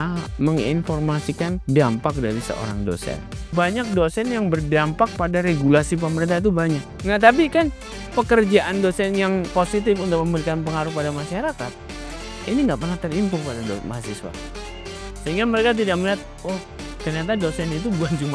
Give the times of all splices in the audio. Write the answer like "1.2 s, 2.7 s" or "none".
1.6 s, 3.5 s, 6.9 s, 9.5 s

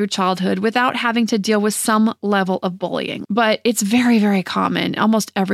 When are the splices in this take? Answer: 3.2 s

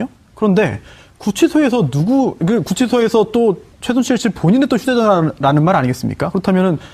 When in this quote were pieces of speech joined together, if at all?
none

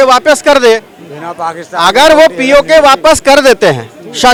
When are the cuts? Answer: none

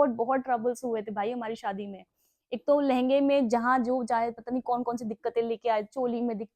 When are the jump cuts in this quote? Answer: none

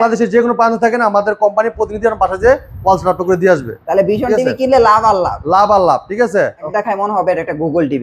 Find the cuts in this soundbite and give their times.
6.7 s

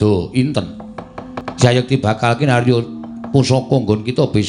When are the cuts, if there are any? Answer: 1.4 s

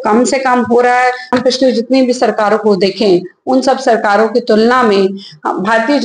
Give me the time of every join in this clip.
1.3 s

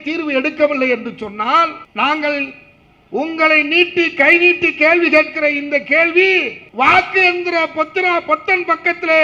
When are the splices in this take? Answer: 1.8 s, 6.6 s

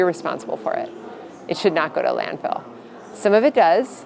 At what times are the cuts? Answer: none

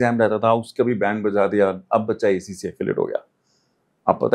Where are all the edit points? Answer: none

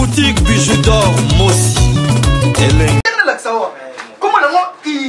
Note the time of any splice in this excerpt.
1.0 s

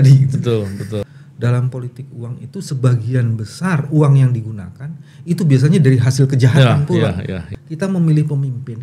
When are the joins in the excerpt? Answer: 1.2 s, 7.5 s

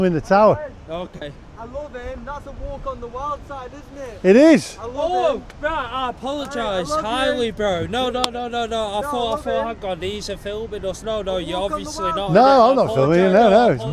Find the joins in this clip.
none

